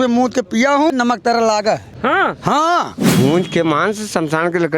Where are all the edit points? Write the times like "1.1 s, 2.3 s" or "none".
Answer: 0.9 s, 1.9 s, 3.0 s